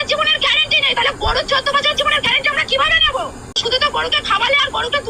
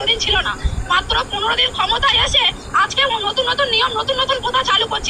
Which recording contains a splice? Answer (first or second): first